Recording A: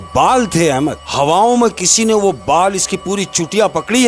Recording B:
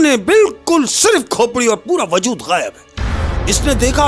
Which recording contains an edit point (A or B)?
A